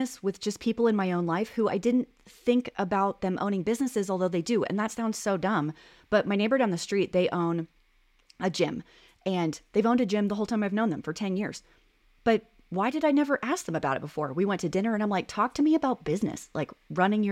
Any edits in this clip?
no; 0 cuts

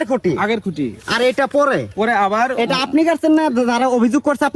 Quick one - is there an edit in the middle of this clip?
no; 0 cuts

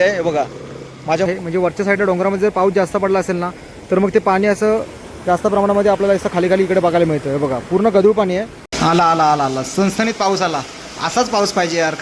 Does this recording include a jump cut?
yes; 2 cuts; at 1.3 s, 8.6 s

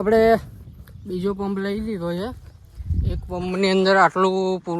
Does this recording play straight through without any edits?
yes; 0 cuts

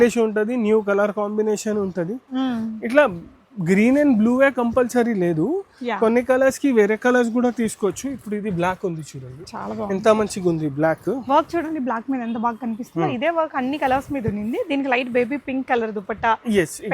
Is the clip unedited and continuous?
yes; 0 cuts

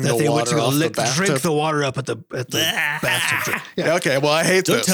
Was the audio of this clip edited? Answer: yes; 1 cut; at 3.9 s

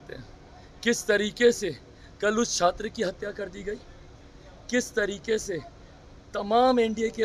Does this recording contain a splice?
no; 0 cuts

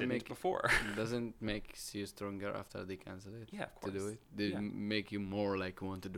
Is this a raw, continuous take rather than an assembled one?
yes; 0 cuts

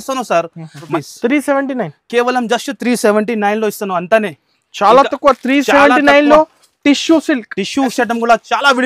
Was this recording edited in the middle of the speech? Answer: yes; 2 cuts; at 0.8 s, 7.9 s

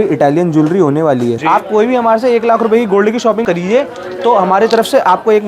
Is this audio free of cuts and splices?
no; 2 cuts; at 1.4 s, 3.4 s

